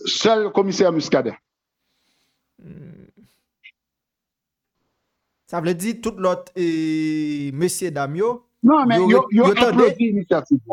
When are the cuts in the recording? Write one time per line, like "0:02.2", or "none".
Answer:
none